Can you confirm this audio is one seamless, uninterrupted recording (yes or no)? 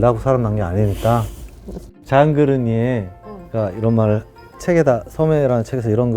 yes